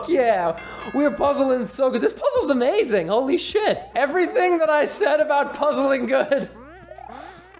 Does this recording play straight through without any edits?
no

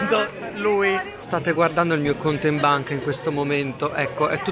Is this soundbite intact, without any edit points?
no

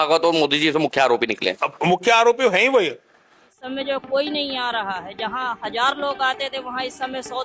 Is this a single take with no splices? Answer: no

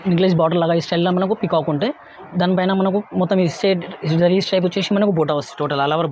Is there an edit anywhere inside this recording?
no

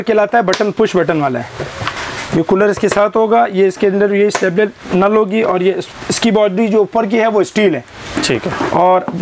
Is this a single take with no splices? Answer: yes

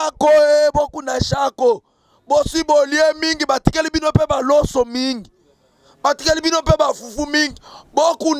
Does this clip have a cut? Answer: no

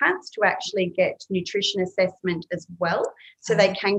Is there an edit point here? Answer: no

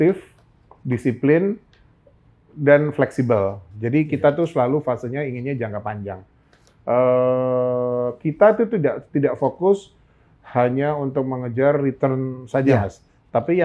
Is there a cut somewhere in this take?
no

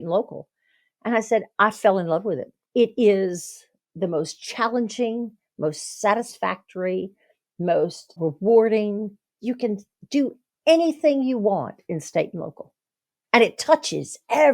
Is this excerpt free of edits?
no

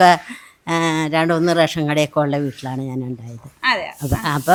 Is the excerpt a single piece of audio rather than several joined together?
yes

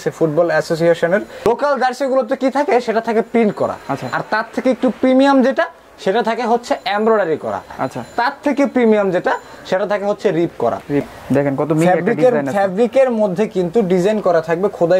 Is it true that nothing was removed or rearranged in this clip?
no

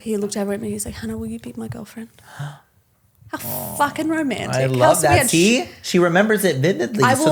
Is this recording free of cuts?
yes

